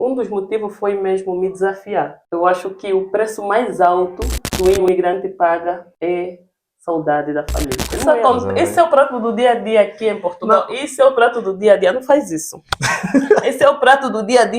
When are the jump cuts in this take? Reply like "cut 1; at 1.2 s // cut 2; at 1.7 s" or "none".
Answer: cut 1; at 2.2 s // cut 2; at 7.9 s